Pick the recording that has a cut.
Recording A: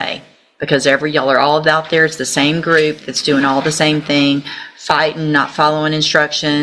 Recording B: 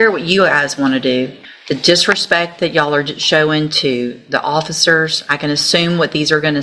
B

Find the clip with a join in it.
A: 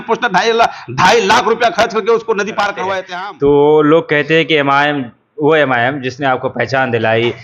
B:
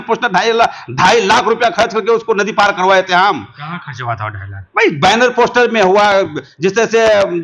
A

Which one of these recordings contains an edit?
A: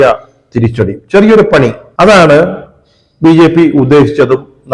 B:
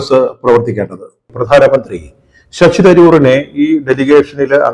B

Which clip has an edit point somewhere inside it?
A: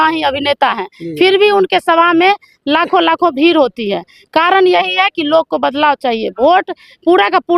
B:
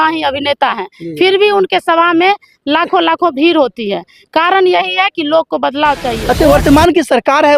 B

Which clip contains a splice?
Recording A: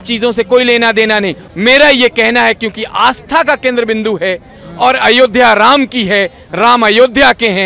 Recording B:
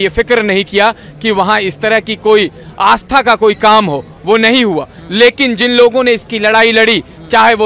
A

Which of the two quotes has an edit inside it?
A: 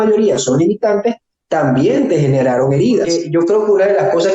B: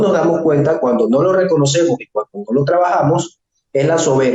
A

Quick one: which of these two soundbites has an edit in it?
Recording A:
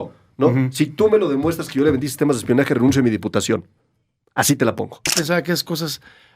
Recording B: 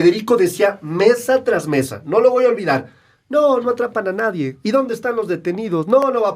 A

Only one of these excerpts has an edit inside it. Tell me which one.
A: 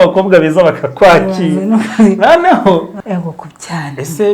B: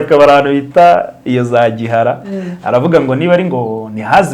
A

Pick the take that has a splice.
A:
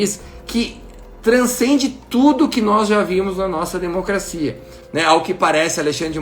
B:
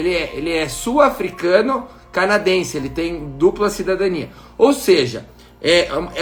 A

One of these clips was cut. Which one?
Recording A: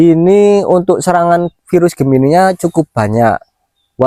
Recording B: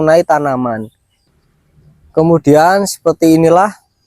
B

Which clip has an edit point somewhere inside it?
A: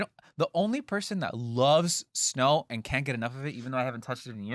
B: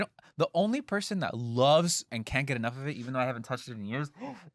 B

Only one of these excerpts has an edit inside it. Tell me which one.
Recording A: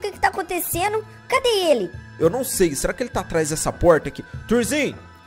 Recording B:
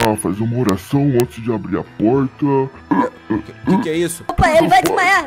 B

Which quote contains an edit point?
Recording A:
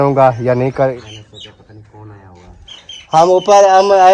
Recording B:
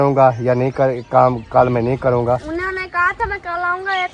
A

